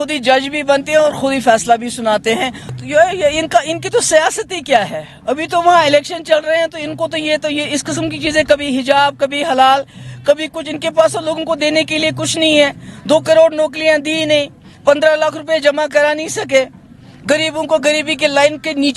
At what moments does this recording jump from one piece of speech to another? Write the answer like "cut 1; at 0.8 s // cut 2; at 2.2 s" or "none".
cut 1; at 2.7 s